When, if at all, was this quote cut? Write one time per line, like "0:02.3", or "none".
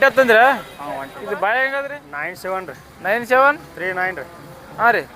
0:02.0

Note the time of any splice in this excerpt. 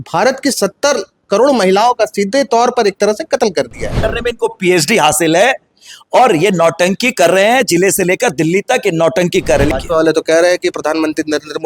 0:04.0
0:09.7

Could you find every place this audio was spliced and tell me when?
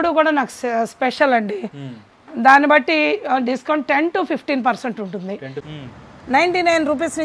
0:05.6

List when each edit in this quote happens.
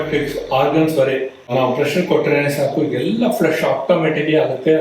0:01.5

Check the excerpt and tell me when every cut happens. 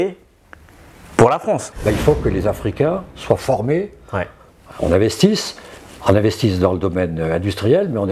0:01.7

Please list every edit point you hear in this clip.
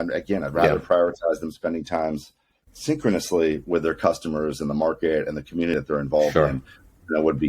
0:05.8

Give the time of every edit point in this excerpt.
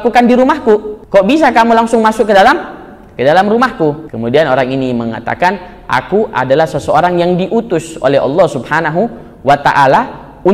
0:01.0
0:04.1

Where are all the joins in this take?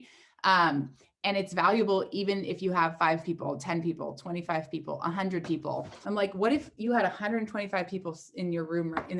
0:05.9

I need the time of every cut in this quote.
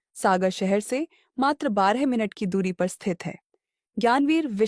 none

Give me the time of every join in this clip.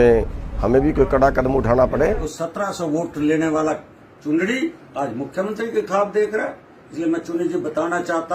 0:02.4

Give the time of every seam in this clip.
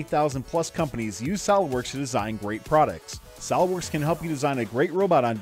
none

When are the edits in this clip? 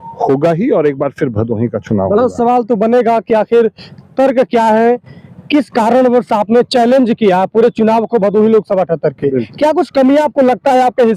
none

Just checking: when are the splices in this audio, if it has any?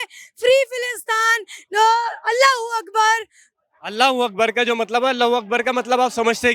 none

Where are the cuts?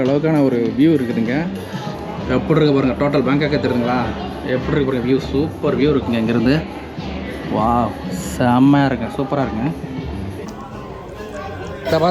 0:01.9
0:10.4

